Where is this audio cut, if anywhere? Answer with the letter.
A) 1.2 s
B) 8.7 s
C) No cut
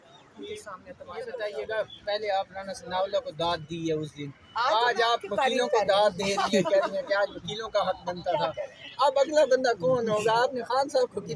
A